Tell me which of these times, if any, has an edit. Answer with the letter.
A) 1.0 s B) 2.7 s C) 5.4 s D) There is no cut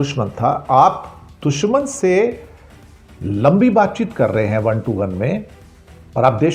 D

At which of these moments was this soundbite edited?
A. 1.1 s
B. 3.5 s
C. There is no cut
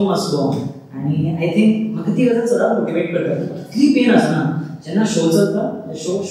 C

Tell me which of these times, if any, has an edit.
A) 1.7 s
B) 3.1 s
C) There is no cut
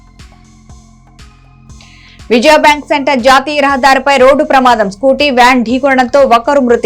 A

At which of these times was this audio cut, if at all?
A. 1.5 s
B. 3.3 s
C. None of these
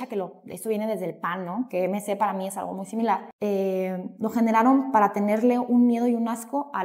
B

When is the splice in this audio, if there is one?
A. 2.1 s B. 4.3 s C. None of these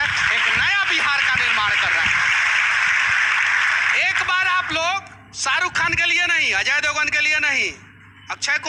C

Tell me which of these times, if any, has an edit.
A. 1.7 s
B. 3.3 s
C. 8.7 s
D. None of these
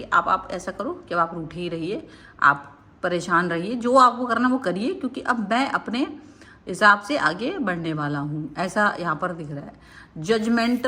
D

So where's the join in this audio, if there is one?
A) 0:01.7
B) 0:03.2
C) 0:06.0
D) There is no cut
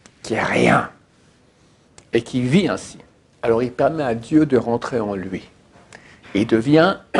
D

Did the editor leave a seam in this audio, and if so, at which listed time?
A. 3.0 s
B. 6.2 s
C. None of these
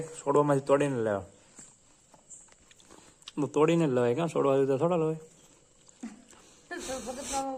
C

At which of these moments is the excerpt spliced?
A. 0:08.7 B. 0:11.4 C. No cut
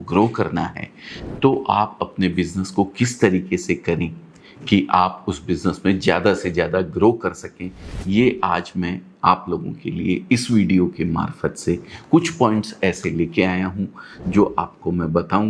C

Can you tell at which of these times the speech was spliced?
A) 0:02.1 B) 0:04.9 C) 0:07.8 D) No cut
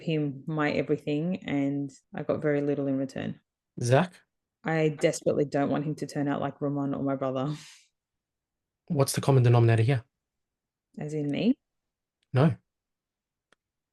A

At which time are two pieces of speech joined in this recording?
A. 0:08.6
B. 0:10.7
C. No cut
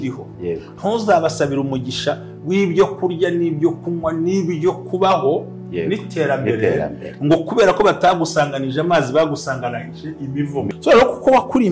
B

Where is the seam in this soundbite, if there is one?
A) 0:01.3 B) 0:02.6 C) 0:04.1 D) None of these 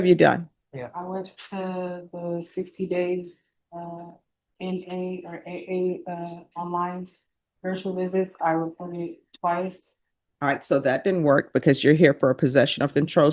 D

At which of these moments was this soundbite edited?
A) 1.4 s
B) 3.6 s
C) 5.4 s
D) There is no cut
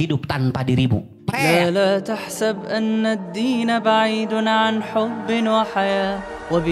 A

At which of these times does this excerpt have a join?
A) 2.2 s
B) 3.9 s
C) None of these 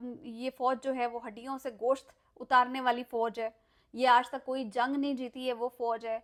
C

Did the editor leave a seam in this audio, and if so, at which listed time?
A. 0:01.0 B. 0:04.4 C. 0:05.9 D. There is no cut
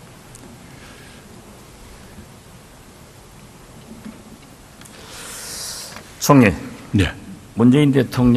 D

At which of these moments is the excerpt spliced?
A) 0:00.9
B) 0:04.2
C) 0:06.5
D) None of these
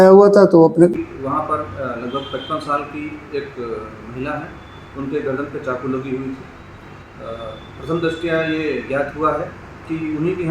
A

